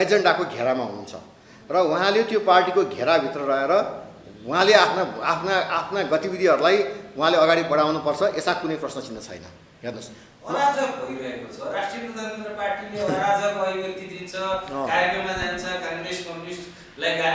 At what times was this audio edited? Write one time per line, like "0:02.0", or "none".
none